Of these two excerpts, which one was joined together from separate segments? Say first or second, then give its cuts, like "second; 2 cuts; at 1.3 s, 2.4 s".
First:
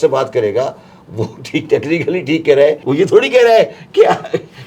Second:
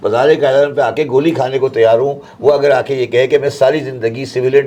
first; 1 cut; at 2.8 s